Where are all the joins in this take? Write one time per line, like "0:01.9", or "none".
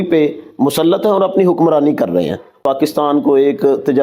0:02.6